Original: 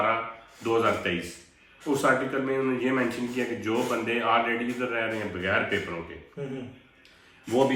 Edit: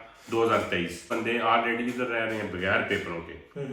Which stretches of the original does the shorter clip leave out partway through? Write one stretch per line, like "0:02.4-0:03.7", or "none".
0:01.4-0:03.9